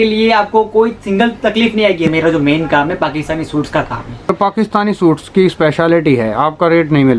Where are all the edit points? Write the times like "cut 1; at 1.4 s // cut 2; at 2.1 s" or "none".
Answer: cut 1; at 2.1 s // cut 2; at 4.3 s